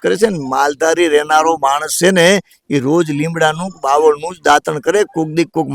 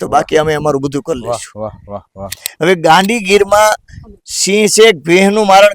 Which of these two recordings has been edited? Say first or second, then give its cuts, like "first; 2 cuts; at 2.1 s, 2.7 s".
second; 1 cut; at 2.3 s